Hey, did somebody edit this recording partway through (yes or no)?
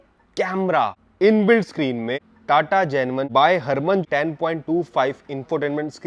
yes